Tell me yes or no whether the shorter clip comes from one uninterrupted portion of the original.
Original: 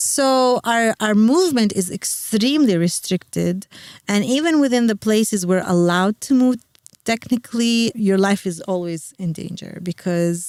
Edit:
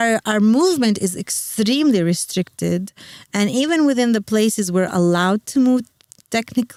yes